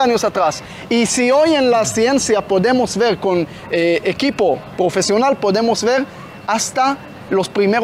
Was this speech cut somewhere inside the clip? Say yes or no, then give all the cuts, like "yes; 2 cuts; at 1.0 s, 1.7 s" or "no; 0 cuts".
no; 0 cuts